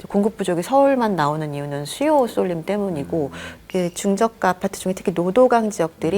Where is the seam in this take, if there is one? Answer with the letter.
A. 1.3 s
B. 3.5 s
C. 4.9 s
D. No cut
B